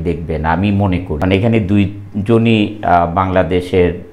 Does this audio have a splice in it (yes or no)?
yes